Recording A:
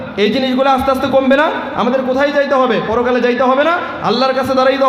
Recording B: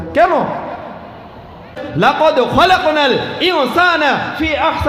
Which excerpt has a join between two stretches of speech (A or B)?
B